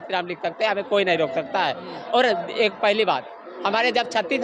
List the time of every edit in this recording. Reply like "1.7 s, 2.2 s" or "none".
none